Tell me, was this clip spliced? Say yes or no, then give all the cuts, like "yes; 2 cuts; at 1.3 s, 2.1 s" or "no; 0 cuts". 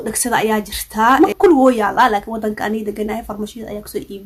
yes; 1 cut; at 1.2 s